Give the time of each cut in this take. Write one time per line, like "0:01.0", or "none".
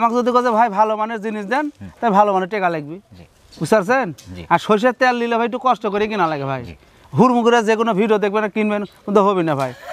none